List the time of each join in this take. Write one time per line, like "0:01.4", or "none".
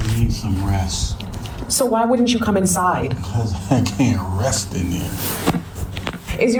none

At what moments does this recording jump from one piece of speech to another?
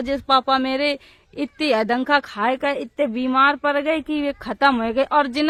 none

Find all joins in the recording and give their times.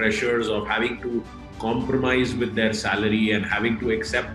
none

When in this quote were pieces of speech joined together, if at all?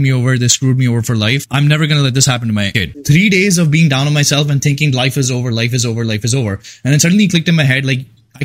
0:01.4
0:02.8

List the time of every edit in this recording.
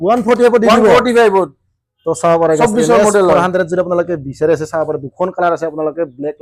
none

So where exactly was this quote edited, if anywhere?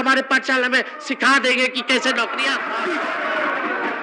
0:02.7

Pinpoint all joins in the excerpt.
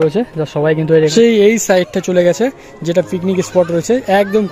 0:01.1

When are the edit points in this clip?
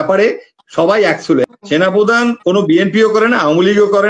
0:01.4

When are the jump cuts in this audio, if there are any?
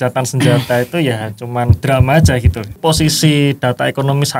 0:02.8

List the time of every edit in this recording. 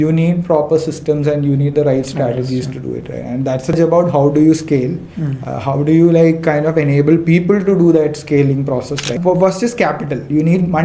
0:03.8
0:09.1

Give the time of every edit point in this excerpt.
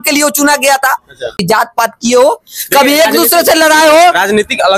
0:01.4

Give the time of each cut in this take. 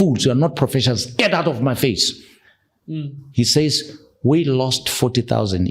none

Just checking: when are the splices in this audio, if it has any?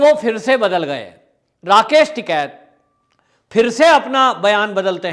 none

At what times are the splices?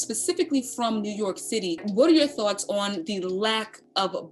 0:01.9

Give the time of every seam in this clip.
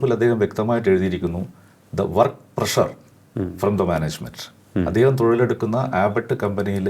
none

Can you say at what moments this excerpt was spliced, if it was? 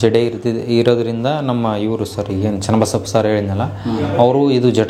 none

